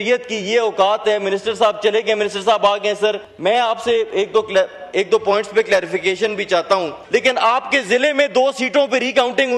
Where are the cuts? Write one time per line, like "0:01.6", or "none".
0:03.3
0:07.0